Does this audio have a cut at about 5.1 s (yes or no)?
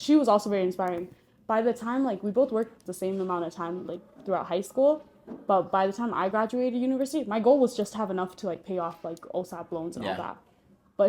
no